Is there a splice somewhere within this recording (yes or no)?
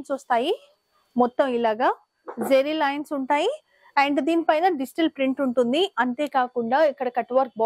no